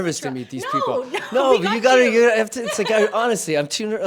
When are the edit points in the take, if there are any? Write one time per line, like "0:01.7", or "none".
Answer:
none